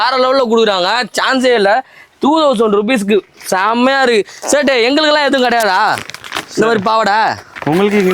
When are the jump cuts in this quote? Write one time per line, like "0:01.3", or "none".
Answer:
none